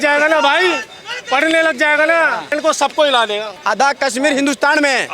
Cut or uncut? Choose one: cut